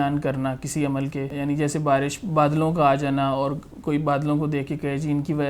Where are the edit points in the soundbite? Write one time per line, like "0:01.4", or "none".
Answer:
0:01.3